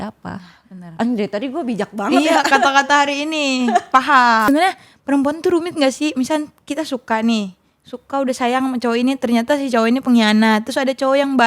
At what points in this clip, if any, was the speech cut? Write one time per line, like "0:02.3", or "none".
0:04.5